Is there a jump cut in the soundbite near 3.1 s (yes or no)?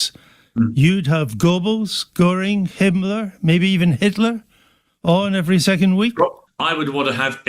no